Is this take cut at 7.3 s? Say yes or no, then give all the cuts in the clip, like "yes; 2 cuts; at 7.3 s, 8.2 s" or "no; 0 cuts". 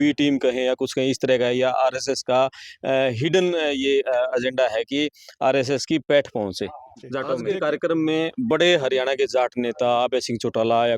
yes; 1 cut; at 7.3 s